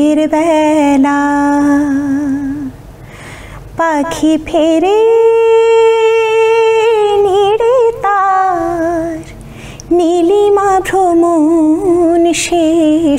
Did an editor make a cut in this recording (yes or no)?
no